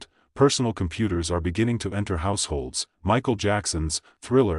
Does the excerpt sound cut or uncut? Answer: cut